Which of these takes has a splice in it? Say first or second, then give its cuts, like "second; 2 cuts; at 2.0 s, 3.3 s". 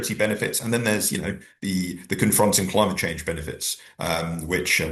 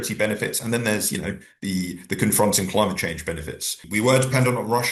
second; 1 cut; at 3.8 s